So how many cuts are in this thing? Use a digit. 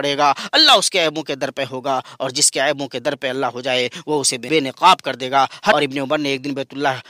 2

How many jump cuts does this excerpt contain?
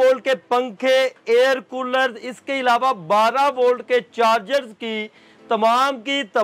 0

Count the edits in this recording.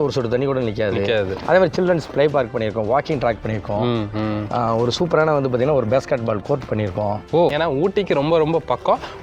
1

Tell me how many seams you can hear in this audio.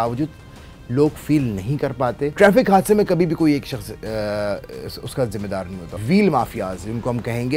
2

